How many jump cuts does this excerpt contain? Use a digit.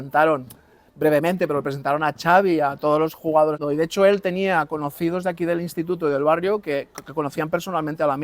1